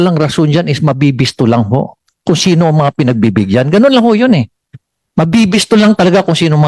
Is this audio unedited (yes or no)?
yes